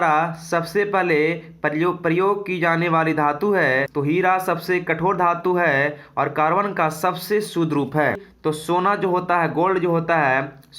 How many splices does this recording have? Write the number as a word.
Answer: two